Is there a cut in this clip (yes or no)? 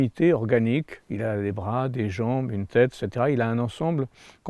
no